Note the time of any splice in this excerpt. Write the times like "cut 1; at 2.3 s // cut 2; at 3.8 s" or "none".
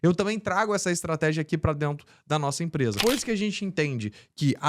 cut 1; at 3.0 s